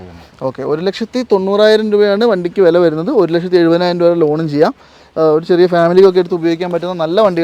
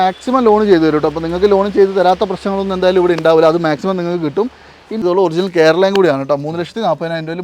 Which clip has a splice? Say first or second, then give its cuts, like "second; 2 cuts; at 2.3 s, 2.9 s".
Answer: second; 1 cut; at 5.0 s